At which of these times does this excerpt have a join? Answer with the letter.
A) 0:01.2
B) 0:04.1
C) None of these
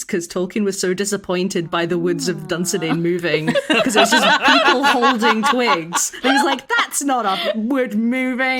C